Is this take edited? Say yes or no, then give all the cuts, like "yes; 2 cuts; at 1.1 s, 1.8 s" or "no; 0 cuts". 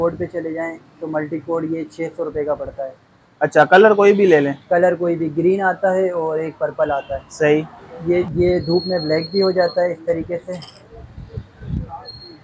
yes; 1 cut; at 8.3 s